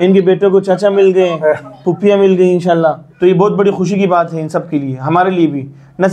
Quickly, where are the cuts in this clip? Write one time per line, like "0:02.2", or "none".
0:03.1